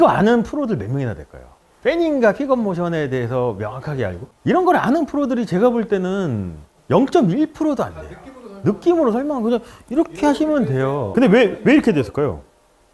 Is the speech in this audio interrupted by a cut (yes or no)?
yes